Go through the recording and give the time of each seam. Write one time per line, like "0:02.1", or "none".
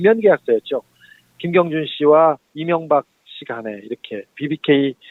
none